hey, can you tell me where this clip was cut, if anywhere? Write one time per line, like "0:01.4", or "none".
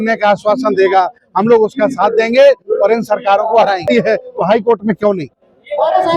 0:03.8